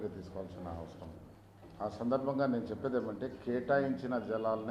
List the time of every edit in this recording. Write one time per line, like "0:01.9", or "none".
0:01.3

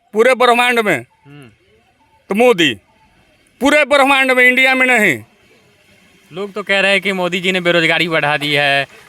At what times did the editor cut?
none

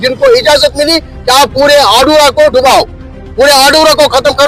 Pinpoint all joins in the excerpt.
none

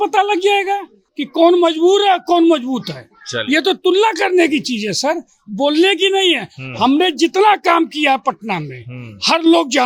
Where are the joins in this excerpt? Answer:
none

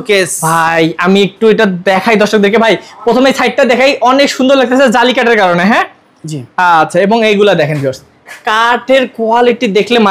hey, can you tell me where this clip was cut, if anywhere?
none

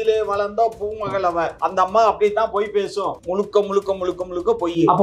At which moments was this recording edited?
0:01.5
0:03.2

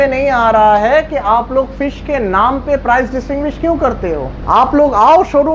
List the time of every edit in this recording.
0:04.3

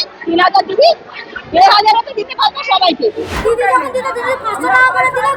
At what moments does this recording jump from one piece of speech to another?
0:03.3

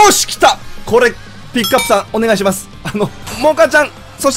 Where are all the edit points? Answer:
0:03.2

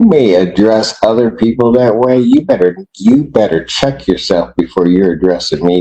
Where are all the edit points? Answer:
none

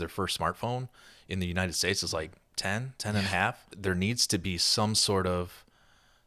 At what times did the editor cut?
0:03.7

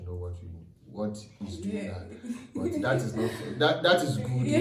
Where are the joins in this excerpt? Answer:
none

